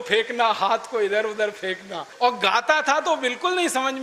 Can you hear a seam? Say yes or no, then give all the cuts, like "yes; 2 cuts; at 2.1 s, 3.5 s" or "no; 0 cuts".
yes; 1 cut; at 2.0 s